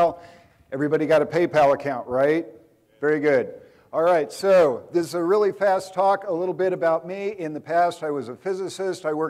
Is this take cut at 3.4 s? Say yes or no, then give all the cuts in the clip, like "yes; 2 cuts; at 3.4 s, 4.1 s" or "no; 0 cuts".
no; 1 cut; at 7.6 s